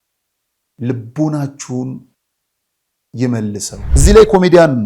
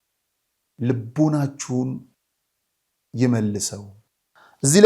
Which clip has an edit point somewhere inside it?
first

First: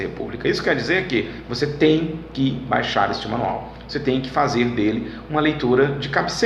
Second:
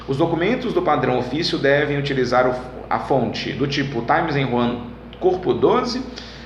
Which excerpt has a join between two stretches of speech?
first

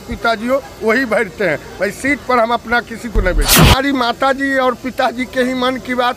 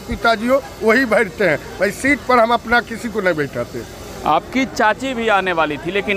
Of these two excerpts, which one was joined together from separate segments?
first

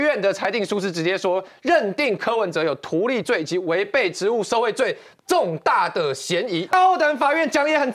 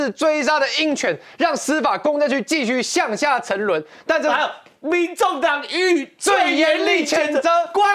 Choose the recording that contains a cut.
first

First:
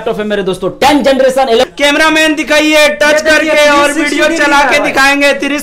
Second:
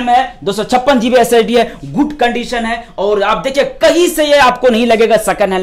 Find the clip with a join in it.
first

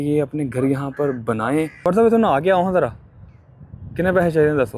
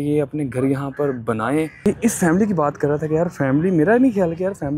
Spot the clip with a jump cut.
second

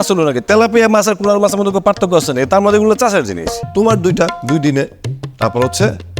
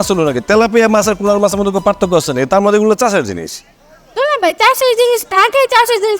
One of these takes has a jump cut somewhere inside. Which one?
first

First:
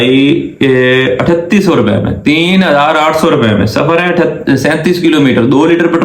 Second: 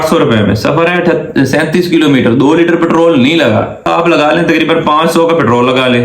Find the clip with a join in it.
second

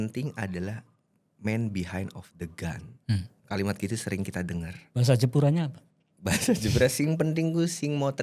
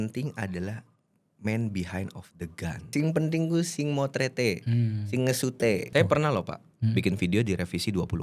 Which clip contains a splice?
second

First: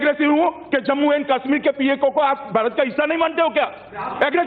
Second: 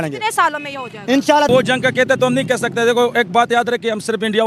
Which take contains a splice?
second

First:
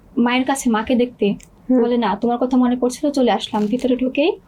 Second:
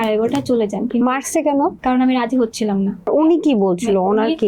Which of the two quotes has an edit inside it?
second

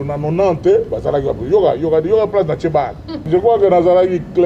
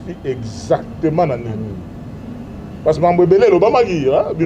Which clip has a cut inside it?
first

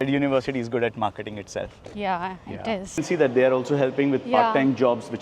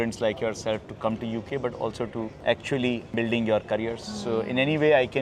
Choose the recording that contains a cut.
first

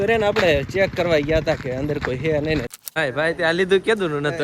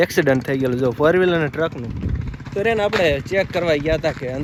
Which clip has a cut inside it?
first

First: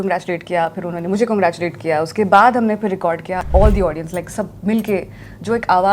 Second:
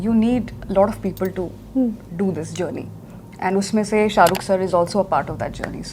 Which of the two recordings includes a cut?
first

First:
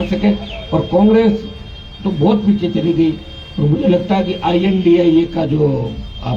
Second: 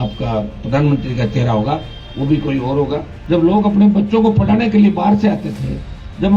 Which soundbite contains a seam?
second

